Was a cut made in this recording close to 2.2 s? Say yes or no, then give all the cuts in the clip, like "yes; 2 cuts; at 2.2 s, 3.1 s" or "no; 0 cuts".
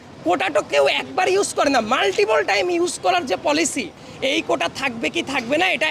no; 1 cut; at 4.0 s